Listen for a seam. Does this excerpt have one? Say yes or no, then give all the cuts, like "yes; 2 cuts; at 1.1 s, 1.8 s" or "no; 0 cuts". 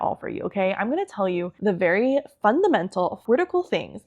yes; 2 cuts; at 1.5 s, 3.2 s